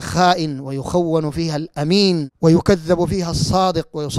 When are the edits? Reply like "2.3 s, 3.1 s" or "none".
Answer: 2.3 s